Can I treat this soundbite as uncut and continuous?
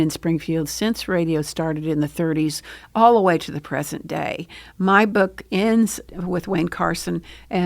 no; 1 cut; at 6.1 s

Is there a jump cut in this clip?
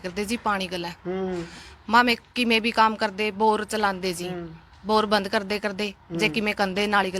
no; 0 cuts

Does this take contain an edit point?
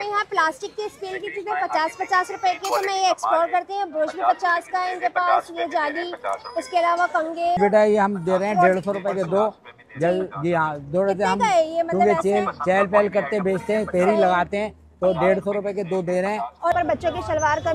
yes; 2 cuts; at 7.6 s, 16.7 s

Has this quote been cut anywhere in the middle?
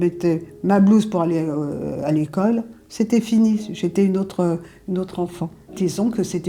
no; 0 cuts

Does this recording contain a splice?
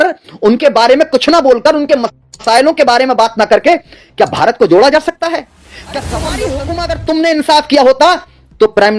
yes; 1 cut; at 6.5 s

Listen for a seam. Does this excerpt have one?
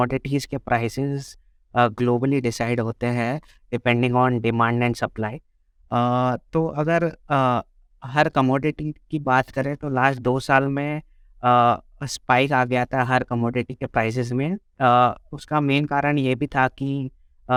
no; 0 cuts

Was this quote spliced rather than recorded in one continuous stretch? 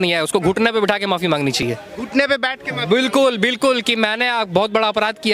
no; 0 cuts

